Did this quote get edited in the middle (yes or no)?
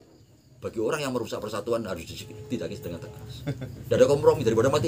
no